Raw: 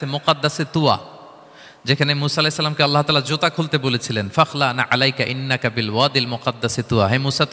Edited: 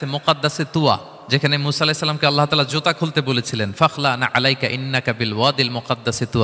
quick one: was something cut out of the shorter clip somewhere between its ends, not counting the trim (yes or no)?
yes